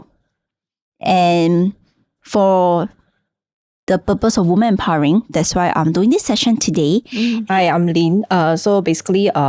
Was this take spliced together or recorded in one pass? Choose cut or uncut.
cut